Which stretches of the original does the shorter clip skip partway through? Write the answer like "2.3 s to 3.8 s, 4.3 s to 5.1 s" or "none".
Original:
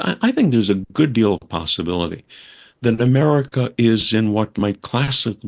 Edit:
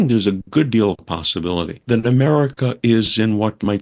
2.2 s to 2.7 s